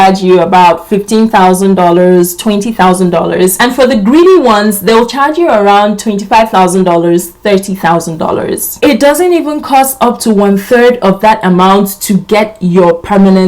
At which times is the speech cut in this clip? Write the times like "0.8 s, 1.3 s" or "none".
8.6 s